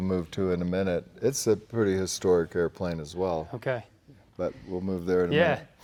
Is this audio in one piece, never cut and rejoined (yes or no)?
yes